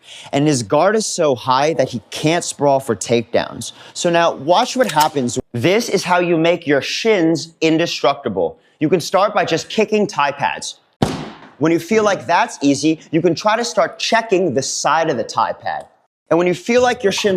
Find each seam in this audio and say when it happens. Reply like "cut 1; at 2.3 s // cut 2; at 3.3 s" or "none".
cut 1; at 5.5 s

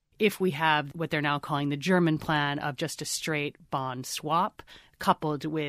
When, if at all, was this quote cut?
cut 1; at 0.9 s

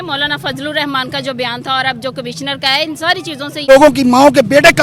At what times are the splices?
cut 1; at 3.6 s

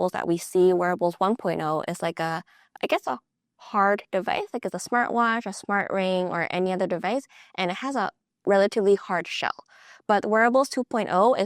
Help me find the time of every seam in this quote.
cut 1; at 2.7 s

